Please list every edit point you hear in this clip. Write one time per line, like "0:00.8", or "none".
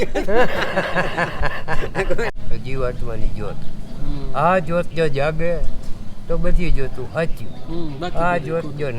0:02.3